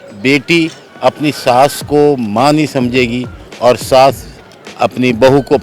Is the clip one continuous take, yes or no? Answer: yes